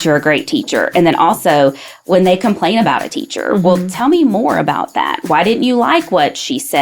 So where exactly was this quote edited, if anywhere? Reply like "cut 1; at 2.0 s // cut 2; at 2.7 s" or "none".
cut 1; at 5.3 s